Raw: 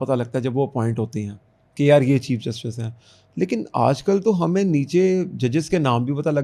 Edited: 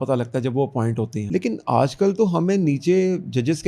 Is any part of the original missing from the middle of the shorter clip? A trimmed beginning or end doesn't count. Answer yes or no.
yes